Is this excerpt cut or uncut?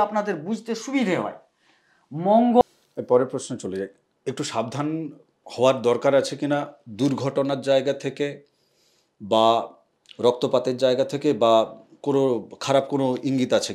cut